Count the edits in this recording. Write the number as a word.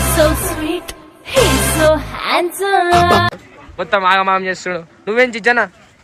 zero